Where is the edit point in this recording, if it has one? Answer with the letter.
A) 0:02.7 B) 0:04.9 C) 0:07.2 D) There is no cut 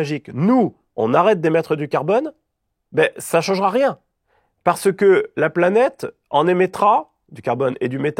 D